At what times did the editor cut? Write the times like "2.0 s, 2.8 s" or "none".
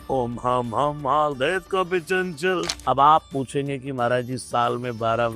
2.7 s